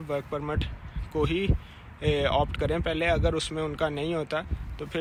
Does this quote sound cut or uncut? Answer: uncut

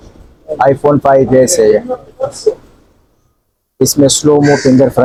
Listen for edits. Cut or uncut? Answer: uncut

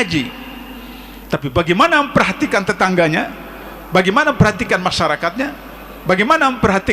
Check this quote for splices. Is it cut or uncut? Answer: uncut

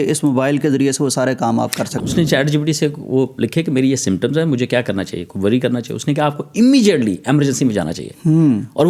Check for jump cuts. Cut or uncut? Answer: cut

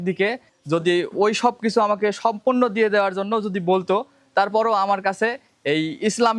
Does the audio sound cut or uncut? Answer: uncut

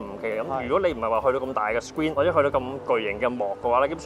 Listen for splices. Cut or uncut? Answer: cut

